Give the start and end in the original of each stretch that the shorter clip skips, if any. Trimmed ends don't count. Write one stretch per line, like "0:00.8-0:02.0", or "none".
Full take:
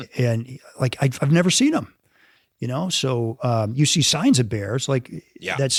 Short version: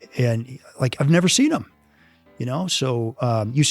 0:00.9-0:01.2